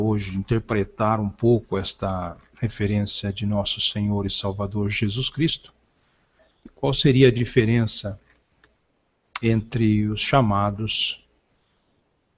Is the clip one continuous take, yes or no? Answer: yes